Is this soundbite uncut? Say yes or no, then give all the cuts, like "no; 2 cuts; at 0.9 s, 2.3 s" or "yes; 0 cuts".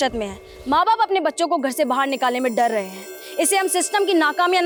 yes; 0 cuts